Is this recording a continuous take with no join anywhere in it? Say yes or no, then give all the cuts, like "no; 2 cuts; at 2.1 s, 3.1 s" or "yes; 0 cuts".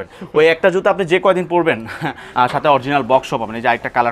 no; 1 cut; at 2.2 s